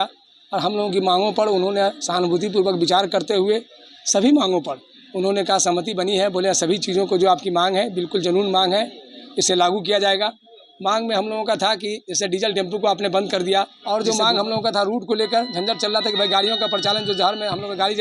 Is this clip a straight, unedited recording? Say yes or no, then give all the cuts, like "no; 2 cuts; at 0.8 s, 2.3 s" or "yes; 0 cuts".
no; 1 cut; at 13.8 s